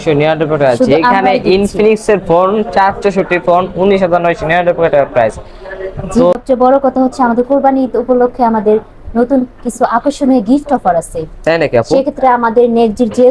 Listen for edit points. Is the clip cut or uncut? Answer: cut